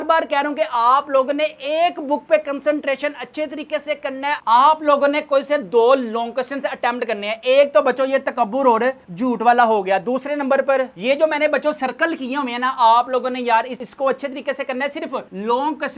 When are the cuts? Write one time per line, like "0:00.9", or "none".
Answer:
0:04.3